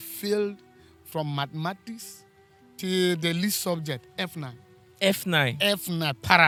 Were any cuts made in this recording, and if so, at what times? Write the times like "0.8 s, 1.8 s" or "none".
none

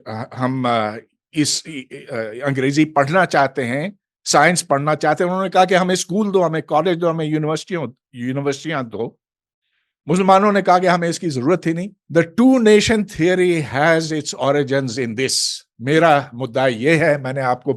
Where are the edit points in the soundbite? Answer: 11.9 s

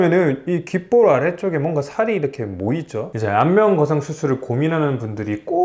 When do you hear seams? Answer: 3.1 s

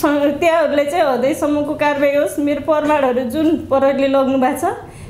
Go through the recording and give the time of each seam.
none

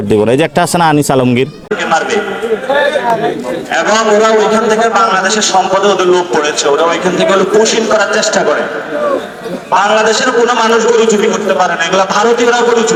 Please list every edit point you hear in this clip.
none

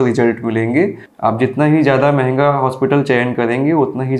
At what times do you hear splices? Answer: 1.0 s

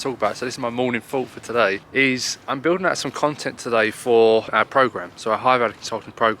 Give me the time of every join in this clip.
1.8 s, 4.5 s

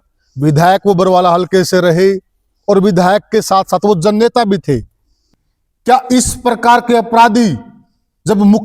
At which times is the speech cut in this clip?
5.1 s

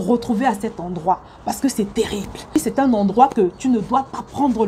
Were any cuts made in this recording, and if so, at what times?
2.6 s

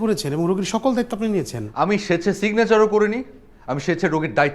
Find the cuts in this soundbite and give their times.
1.6 s

